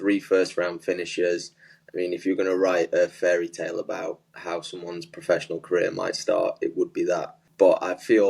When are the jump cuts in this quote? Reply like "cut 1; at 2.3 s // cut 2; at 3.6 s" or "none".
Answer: cut 1; at 7.4 s